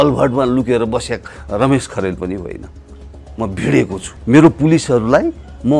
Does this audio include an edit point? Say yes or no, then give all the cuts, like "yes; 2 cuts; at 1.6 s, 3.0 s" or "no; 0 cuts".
yes; 1 cut; at 4.1 s